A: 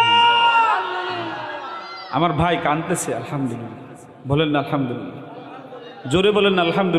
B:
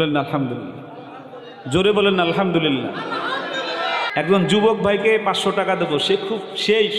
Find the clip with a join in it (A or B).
B